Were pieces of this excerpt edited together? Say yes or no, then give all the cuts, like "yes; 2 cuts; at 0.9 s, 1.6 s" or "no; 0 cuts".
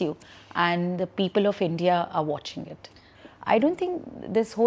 yes; 1 cut; at 3.0 s